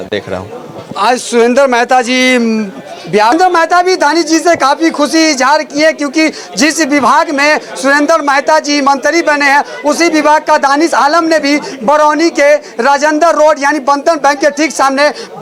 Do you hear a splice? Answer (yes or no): no